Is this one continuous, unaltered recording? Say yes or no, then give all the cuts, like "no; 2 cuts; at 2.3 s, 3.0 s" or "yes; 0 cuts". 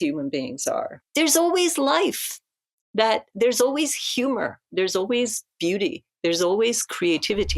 no; 1 cut; at 1.0 s